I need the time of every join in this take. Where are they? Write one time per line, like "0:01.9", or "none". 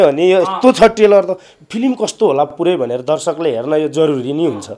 none